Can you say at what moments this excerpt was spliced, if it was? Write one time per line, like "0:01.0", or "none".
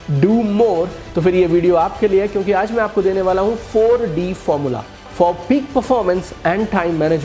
0:05.0